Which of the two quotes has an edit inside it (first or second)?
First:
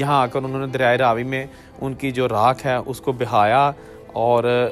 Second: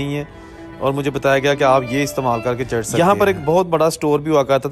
second